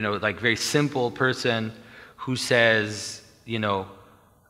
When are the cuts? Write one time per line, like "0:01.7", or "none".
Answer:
none